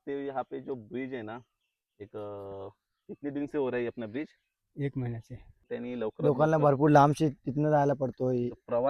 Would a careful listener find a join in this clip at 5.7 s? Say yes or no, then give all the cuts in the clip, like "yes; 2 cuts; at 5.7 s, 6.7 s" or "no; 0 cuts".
yes; 1 cut; at 5.7 s